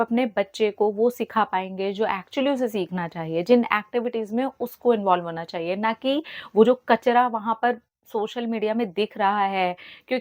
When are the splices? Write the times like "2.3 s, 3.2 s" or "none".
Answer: none